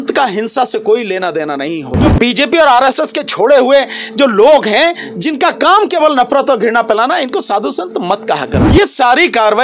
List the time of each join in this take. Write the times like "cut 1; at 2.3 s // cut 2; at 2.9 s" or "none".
cut 1; at 2.1 s // cut 2; at 8.6 s